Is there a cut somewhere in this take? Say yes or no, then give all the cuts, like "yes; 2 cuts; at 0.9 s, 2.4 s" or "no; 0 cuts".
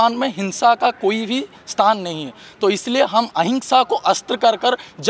no; 0 cuts